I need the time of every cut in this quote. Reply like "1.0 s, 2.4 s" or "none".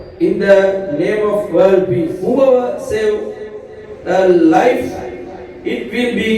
2.4 s

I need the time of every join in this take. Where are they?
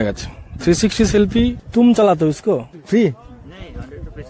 1.6 s, 2.7 s

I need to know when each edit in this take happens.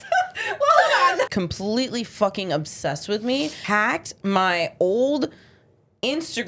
1.3 s, 3.6 s

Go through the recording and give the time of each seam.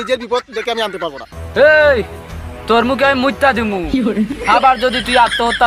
1.3 s

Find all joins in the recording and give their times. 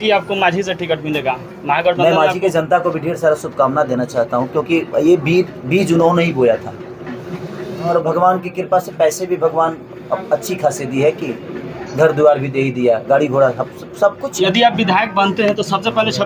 7.9 s, 14.3 s

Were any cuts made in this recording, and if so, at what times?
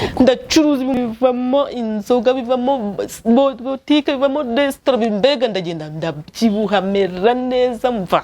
0.9 s

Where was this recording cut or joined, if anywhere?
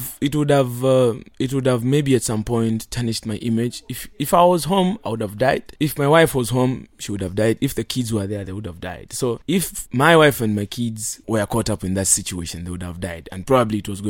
1.3 s, 5.7 s, 9.6 s, 11.1 s

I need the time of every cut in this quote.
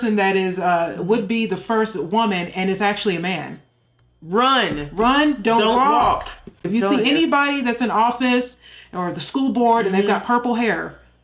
none

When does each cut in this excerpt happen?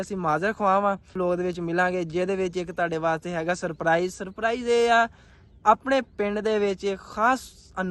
1.1 s

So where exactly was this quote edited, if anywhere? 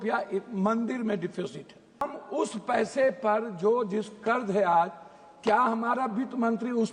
2.1 s

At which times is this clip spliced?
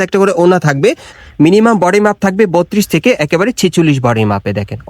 1.1 s

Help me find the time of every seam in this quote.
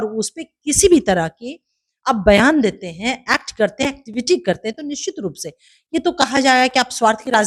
none

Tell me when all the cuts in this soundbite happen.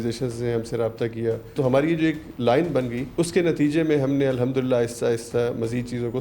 1.6 s, 3.0 s

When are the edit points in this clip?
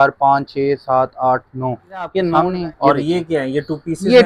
2.3 s

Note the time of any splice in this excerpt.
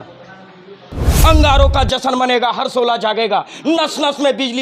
1.1 s

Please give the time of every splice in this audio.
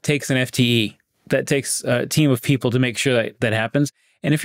none

